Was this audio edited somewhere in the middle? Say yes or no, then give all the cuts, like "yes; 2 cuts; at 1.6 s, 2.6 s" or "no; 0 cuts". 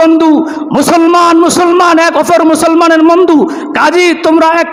no; 0 cuts